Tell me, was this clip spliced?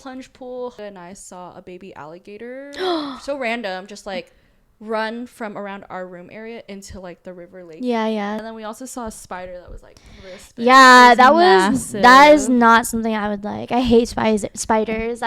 yes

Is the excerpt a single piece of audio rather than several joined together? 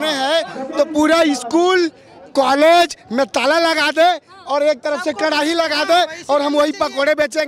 yes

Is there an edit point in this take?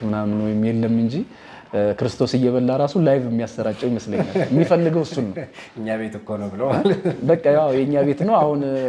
no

